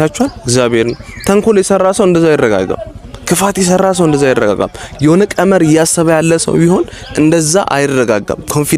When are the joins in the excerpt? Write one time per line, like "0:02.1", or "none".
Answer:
none